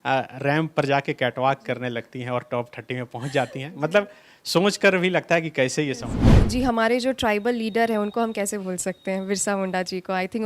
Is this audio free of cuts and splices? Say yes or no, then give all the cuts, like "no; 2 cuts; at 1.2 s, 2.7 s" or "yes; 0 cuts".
no; 1 cut; at 6.3 s